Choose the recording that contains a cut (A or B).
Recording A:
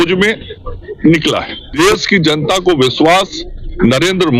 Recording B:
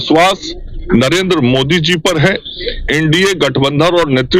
A